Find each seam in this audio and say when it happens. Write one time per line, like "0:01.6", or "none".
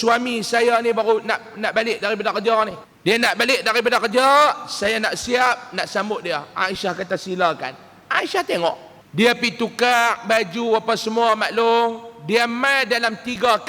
0:02.8
0:08.9